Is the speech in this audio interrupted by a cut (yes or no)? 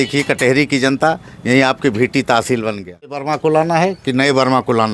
yes